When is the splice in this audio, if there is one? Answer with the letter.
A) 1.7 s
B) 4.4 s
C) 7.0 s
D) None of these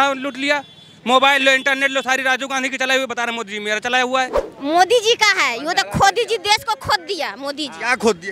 B